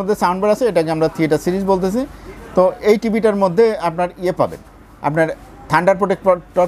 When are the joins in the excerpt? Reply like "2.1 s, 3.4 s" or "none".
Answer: none

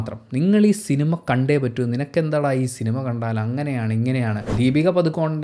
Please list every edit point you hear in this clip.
4.5 s

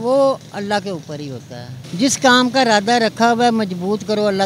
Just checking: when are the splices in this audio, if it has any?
1.8 s

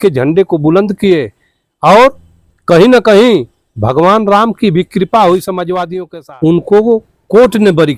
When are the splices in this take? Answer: 5.9 s

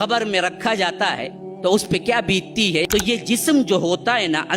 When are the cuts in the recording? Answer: 2.9 s

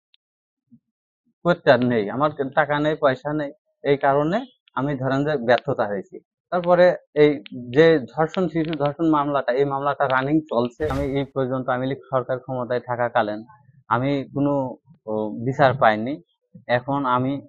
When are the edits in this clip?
10.9 s

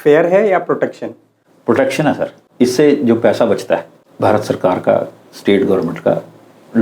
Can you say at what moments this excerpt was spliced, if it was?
2.4 s, 4.0 s

